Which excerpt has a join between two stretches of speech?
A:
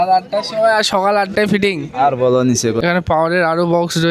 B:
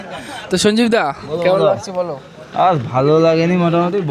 A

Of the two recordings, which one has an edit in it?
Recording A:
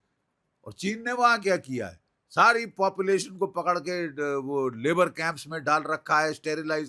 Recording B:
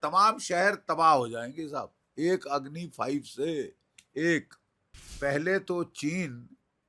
B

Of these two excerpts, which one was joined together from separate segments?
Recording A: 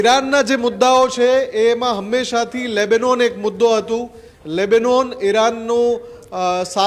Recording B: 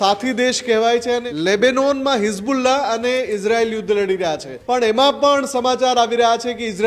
B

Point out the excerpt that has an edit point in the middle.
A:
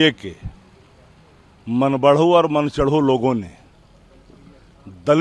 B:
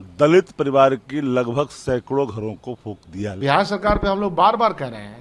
B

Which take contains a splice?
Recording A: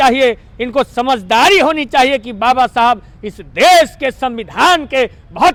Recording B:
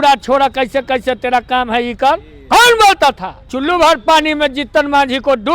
B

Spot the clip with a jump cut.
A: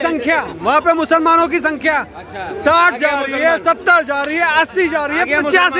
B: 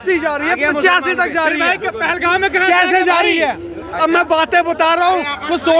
B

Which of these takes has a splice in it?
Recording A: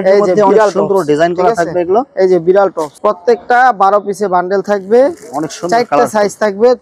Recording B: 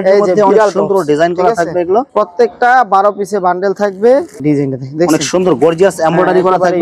B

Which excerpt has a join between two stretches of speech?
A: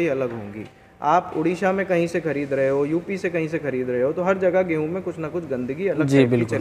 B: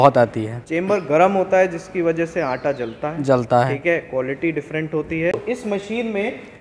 B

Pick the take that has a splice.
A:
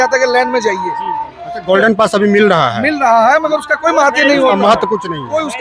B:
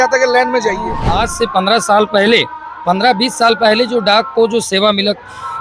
B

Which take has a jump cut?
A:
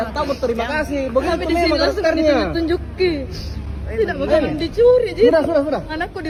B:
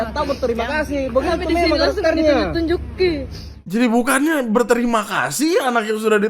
B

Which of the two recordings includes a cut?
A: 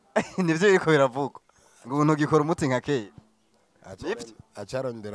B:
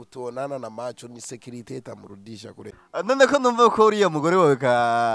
B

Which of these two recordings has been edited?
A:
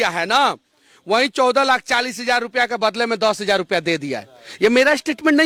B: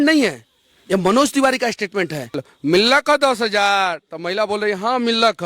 B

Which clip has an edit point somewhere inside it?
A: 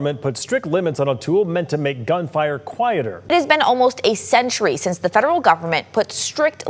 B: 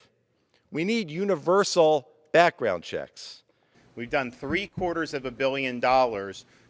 B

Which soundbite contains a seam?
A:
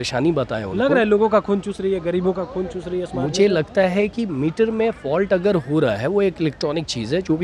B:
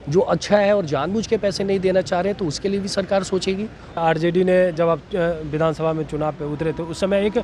B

